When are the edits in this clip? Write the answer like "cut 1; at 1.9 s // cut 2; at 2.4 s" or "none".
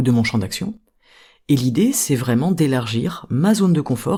none